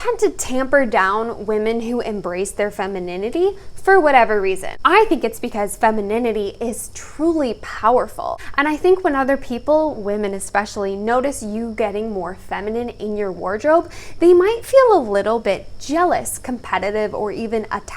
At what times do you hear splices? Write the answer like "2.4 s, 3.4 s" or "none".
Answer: 4.7 s, 8.4 s